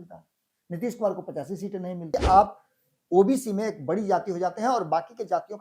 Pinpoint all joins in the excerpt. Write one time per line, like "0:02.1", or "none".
0:02.1